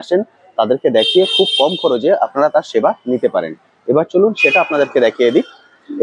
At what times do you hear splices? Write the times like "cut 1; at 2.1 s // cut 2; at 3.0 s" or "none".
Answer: none